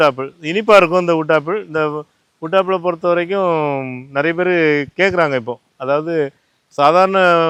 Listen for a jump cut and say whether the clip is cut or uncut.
uncut